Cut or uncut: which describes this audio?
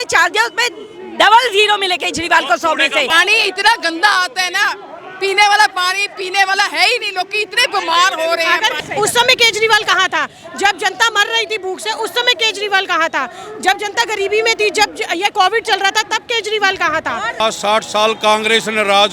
cut